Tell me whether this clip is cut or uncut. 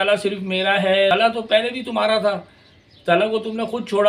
cut